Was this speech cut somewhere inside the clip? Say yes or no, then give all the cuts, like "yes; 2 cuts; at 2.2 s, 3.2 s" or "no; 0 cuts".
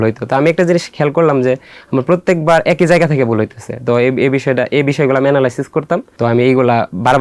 yes; 1 cut; at 6.1 s